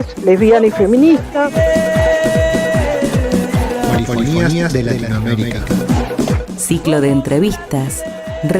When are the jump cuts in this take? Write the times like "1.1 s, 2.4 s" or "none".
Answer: 1.6 s